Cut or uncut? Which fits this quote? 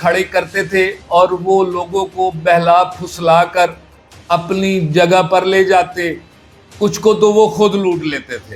uncut